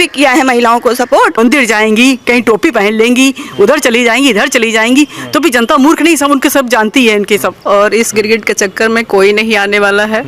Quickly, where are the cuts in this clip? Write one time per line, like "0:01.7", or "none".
0:01.4
0:07.7